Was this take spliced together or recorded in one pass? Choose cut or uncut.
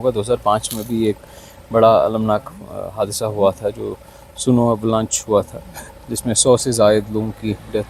uncut